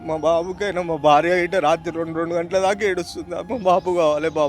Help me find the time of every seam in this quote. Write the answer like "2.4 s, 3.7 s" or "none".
3.4 s